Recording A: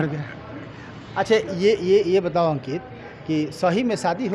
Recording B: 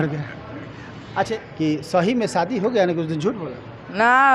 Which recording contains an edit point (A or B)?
B